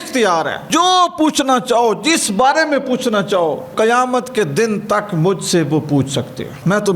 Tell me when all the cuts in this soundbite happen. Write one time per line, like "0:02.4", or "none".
0:03.7